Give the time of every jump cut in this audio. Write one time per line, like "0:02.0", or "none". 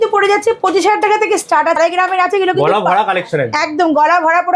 0:01.8